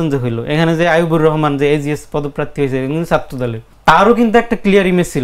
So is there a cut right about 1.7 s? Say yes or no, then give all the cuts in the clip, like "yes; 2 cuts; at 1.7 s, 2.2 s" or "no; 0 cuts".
no; 1 cut; at 3.7 s